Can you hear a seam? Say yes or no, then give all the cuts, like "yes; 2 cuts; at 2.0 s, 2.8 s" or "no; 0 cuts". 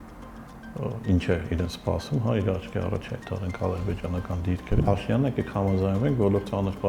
yes; 1 cut; at 4.8 s